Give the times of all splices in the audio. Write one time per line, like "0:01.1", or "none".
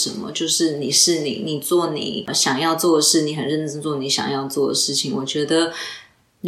0:02.3